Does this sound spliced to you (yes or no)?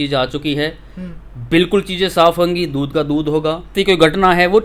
yes